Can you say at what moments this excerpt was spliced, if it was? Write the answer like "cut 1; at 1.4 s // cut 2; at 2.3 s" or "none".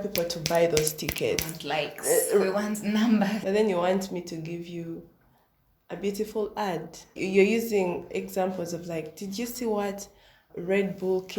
cut 1; at 3.4 s